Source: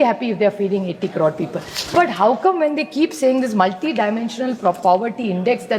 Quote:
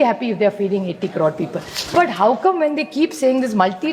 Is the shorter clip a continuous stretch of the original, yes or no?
yes